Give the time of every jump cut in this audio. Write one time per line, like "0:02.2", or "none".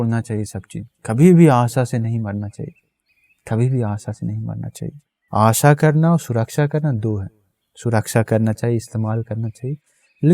0:05.1